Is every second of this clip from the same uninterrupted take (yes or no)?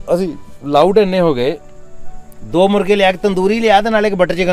yes